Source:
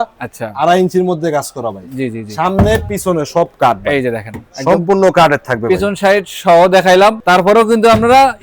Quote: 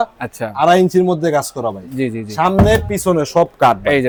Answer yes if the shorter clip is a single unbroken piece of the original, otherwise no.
yes